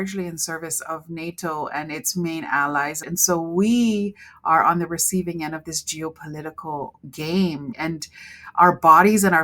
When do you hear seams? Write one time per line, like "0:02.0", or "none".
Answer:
0:03.0
0:07.7